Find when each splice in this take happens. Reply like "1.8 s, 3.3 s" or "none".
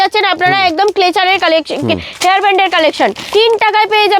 3.2 s